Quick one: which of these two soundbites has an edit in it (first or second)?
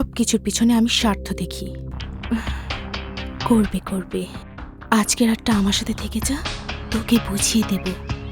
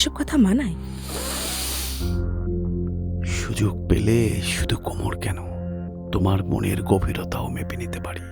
first